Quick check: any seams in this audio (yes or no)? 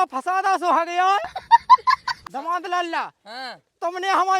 yes